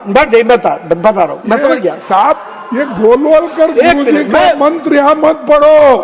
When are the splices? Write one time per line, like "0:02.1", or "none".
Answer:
none